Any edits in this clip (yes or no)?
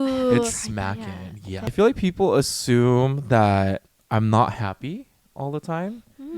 yes